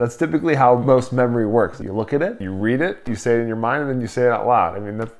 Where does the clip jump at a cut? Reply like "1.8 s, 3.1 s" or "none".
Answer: 0.8 s, 1.8 s, 3.0 s